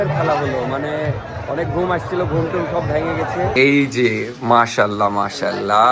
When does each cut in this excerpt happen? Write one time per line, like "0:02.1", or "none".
0:03.5